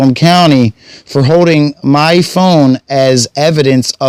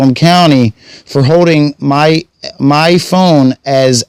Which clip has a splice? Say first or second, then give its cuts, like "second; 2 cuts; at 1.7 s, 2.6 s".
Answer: first; 1 cut; at 1.8 s